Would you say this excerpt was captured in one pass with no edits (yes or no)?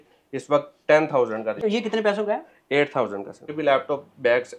no